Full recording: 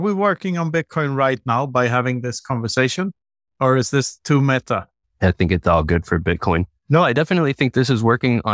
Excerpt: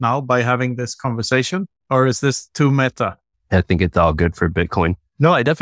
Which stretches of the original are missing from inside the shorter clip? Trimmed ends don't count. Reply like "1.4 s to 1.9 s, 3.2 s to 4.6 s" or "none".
3.2 s to 3.5 s